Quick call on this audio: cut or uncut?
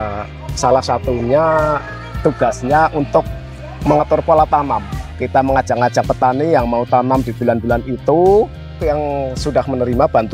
cut